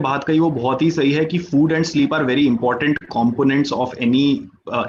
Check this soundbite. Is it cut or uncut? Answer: uncut